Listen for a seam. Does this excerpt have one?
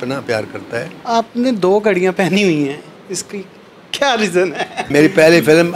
yes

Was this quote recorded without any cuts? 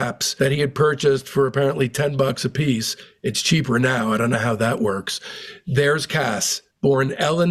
yes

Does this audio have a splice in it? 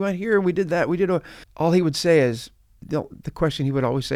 yes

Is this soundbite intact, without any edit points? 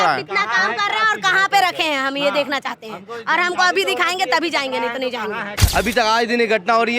no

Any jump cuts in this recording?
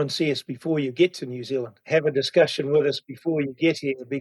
yes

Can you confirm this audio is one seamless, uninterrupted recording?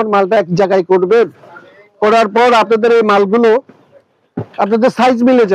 yes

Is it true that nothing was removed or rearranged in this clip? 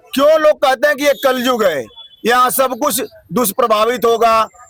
yes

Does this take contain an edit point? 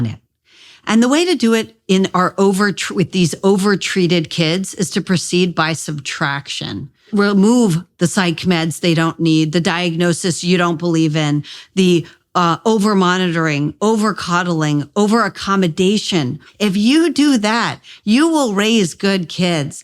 yes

